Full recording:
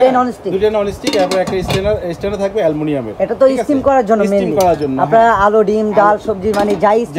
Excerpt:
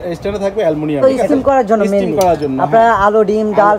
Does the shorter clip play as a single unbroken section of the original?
no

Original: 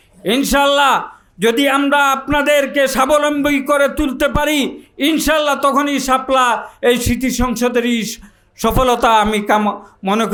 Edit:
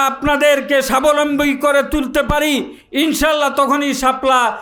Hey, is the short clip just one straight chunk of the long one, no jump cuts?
yes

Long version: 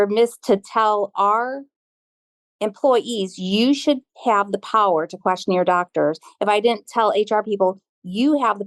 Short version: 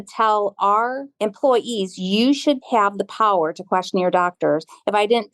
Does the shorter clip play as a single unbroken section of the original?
no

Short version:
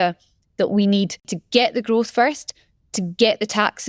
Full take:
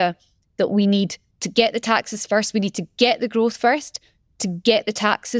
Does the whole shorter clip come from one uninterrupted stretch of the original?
no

